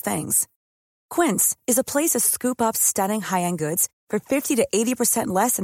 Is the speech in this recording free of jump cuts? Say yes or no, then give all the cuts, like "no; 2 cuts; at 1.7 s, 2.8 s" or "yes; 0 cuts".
yes; 0 cuts